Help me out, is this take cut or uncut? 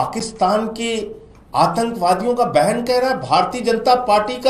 uncut